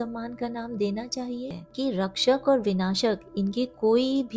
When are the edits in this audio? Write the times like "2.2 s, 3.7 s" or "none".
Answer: 1.5 s